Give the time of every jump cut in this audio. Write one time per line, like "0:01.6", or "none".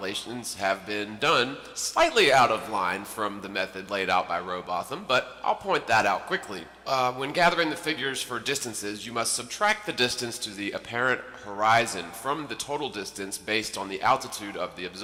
none